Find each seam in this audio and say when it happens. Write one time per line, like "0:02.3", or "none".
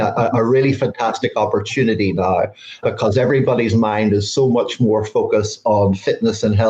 0:02.8